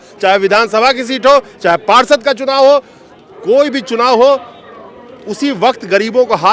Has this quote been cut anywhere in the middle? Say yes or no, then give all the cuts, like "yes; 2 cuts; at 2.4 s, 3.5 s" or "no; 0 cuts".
no; 0 cuts